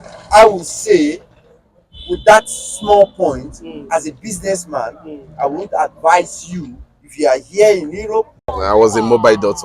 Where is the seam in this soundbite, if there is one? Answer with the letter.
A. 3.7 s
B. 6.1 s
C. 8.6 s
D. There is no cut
C